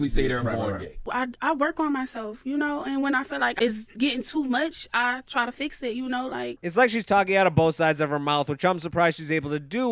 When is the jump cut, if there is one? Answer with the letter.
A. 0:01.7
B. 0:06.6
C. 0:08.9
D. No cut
B